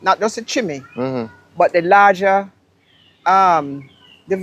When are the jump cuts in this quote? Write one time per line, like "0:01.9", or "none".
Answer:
none